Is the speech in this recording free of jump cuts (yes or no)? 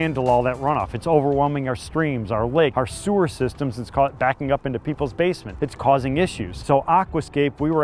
no